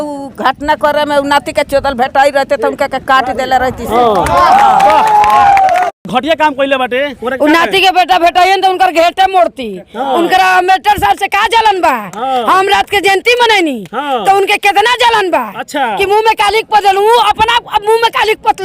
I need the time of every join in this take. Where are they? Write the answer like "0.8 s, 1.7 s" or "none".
6.0 s